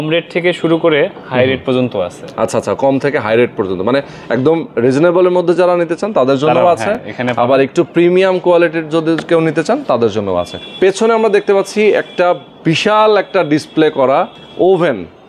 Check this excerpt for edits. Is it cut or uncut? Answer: uncut